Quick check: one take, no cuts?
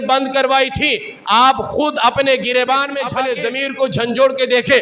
no; 1 cut; at 3.0 s

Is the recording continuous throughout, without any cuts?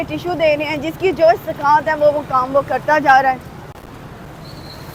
yes; 0 cuts

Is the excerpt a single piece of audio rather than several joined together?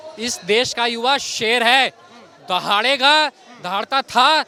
yes; 0 cuts

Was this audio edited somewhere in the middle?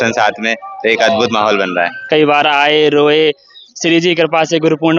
yes; 1 cut; at 2.1 s

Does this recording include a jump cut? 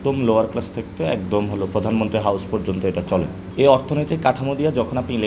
no; 0 cuts

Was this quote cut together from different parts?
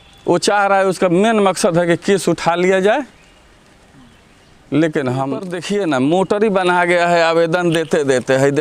yes; 1 cut; at 5.5 s

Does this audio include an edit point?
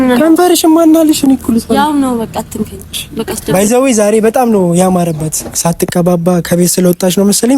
yes; 1 cut; at 3.5 s

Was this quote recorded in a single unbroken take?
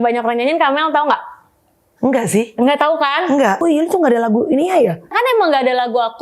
no; 2 cuts; at 3.6 s, 5.1 s

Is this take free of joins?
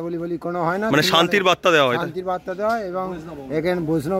yes; 0 cuts

